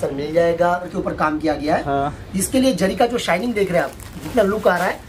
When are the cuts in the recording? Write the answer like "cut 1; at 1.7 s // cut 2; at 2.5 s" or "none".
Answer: cut 1; at 0.9 s